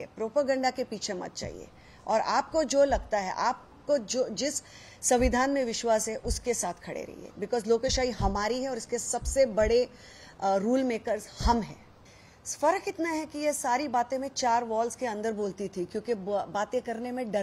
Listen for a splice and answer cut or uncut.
cut